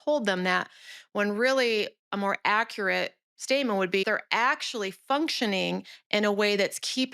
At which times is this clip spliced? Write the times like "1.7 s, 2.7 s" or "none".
4.0 s